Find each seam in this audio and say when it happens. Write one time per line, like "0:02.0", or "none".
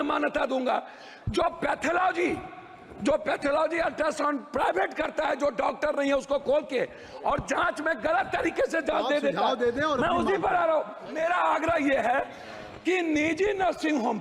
0:11.1